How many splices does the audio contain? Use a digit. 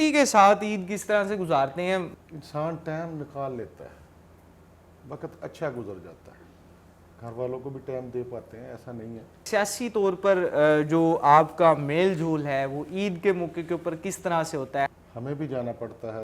3